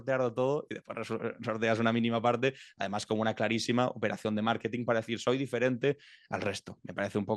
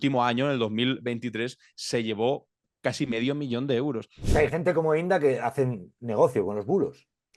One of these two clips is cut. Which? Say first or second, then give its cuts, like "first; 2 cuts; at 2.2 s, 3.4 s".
second; 1 cut; at 4.1 s